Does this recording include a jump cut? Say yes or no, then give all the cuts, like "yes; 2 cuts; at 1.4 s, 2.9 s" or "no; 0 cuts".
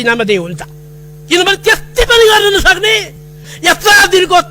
yes; 1 cut; at 3.5 s